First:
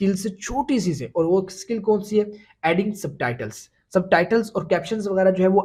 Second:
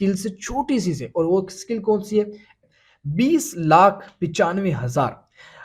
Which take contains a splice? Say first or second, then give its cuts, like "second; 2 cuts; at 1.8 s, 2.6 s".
second; 1 cut; at 2.6 s